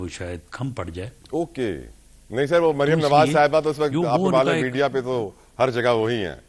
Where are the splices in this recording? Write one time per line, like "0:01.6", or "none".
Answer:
none